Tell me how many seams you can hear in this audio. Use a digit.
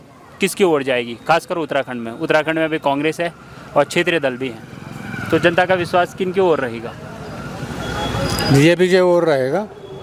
0